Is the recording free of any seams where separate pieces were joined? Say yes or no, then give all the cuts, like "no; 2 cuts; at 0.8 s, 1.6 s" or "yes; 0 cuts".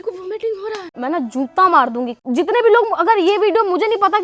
no; 2 cuts; at 0.9 s, 2.1 s